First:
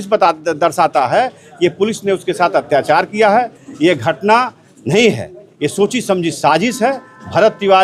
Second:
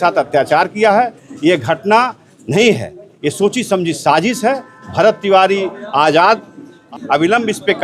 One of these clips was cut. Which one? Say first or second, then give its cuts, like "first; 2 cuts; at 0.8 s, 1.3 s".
second; 1 cut; at 6.8 s